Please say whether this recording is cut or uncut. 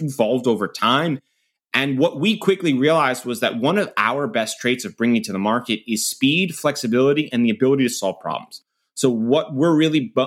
uncut